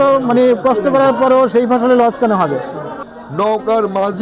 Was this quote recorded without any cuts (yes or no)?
no